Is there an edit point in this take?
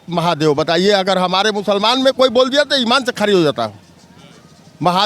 no; 0 cuts

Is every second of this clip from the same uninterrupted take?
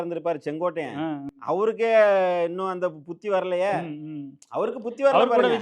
yes; 0 cuts

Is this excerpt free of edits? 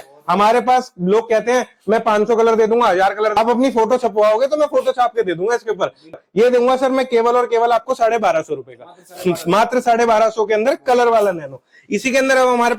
yes; 0 cuts

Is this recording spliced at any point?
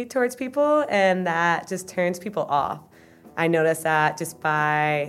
no; 0 cuts

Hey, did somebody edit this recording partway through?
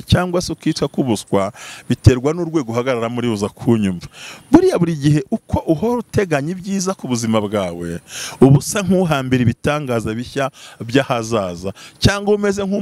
no; 0 cuts

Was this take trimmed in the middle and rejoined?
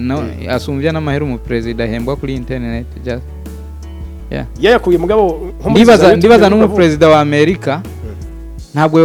no; 0 cuts

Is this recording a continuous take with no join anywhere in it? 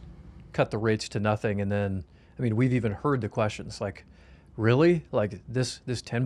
yes; 0 cuts

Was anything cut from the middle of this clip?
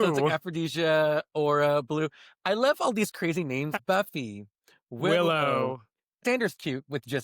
yes; 2 cuts; at 3.7 s, 6.2 s

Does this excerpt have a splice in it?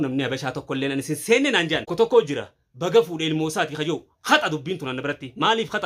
yes; 1 cut; at 1.9 s

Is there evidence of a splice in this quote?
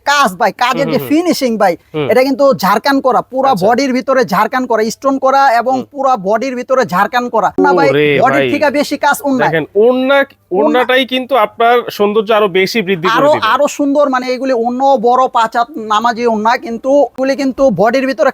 yes; 2 cuts; at 7.6 s, 17.2 s

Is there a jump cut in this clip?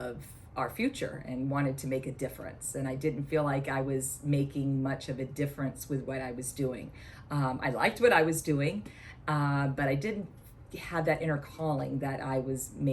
no; 0 cuts

